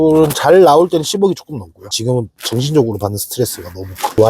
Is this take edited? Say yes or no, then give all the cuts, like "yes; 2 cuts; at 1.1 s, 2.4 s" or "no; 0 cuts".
yes; 1 cut; at 2.0 s